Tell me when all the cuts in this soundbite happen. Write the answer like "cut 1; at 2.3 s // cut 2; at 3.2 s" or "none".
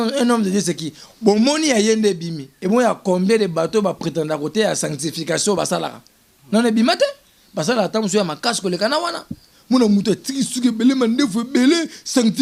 none